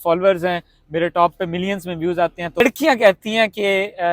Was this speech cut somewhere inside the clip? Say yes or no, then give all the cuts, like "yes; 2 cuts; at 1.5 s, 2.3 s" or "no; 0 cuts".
yes; 1 cut; at 2.6 s